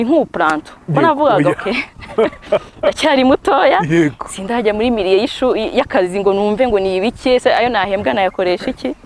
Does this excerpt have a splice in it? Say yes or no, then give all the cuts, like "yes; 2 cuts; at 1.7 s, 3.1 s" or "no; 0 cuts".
no; 0 cuts